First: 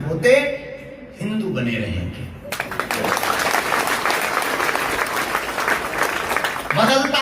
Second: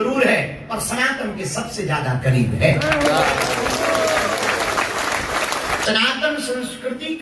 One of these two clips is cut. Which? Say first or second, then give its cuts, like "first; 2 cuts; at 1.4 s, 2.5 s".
second; 1 cut; at 5.8 s